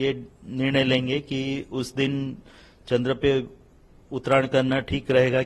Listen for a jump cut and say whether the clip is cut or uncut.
uncut